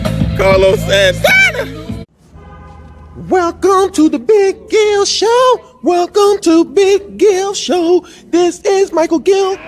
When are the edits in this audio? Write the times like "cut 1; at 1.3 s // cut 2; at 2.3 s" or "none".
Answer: cut 1; at 1.9 s